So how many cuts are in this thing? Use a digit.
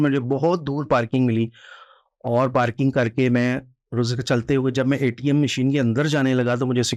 0